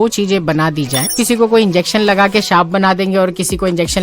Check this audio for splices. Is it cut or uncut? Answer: cut